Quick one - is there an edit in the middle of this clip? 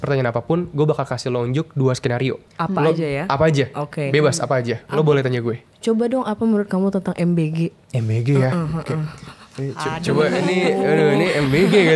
yes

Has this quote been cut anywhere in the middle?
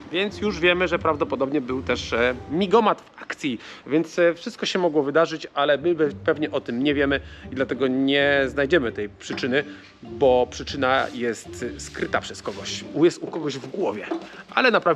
no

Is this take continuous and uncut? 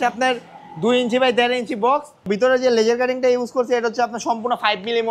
no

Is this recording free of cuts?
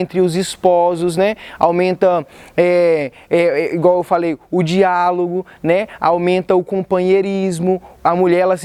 yes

